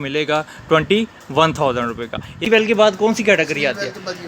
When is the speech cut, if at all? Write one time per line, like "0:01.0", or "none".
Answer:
0:02.5